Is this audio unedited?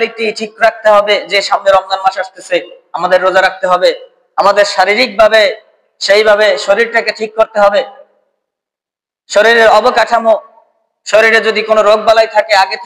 yes; 0 cuts

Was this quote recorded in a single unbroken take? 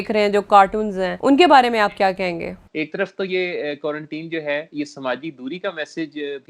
no; 2 cuts; at 1.1 s, 2.6 s

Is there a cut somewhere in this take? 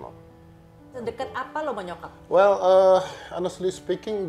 yes; 1 cut; at 1.0 s

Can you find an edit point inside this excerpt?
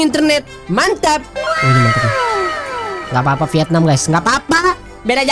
yes; 1 cut; at 1.3 s

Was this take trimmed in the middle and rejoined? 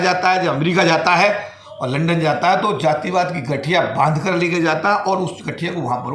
no; 0 cuts

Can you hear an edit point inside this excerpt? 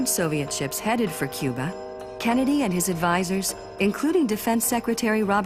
no; 0 cuts

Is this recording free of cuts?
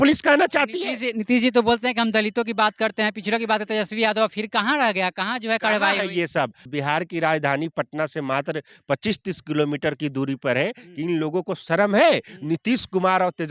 no; 1 cut; at 6.6 s

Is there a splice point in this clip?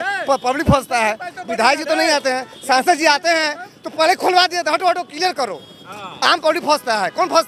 no; 0 cuts

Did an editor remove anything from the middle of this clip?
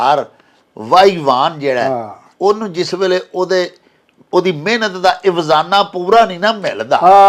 no; 0 cuts

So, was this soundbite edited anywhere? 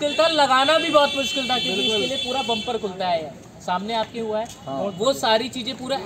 no; 0 cuts

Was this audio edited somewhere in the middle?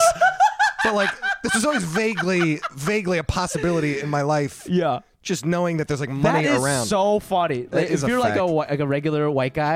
no; 0 cuts

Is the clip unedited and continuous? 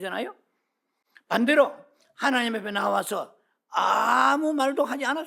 yes; 0 cuts

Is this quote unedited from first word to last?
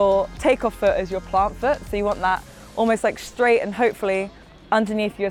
yes; 0 cuts

